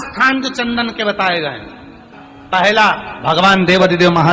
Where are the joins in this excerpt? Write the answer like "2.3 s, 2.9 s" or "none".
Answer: 3.1 s